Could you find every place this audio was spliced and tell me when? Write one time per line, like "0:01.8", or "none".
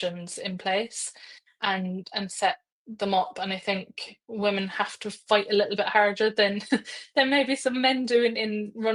none